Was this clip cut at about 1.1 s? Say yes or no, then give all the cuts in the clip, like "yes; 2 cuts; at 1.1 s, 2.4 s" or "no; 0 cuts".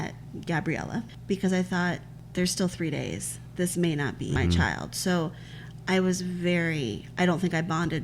yes; 3 cuts; at 1.1 s, 2.1 s, 4.4 s